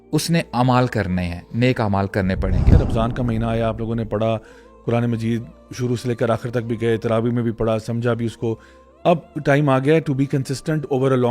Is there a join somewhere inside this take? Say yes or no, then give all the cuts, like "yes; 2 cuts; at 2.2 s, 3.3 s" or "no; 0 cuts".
yes; 1 cut; at 2.8 s